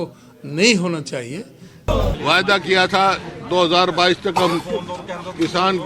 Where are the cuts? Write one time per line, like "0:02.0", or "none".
0:01.9